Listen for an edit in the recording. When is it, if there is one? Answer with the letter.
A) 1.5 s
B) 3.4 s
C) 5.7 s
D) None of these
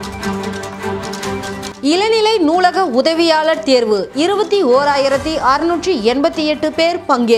D